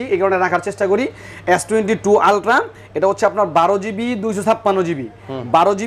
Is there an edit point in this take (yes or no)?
no